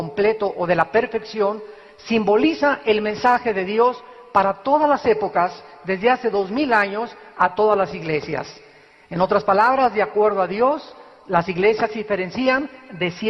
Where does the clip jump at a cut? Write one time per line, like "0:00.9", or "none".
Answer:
0:11.1